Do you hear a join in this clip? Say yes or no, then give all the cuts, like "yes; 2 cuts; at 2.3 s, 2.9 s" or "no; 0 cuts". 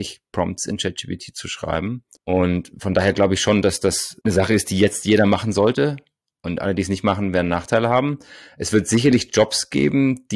no; 0 cuts